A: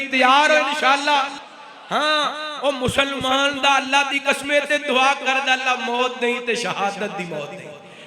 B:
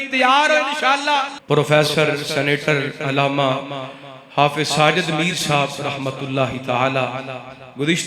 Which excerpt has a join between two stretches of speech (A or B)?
B